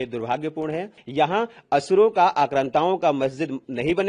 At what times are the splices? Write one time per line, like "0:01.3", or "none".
0:01.0